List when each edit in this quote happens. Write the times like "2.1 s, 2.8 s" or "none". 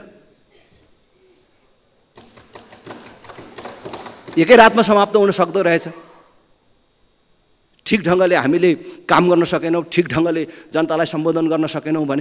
none